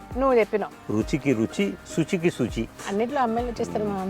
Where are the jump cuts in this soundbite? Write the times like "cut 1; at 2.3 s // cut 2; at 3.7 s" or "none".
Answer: cut 1; at 2.8 s